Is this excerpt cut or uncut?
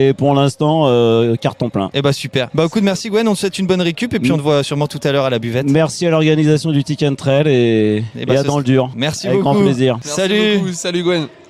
uncut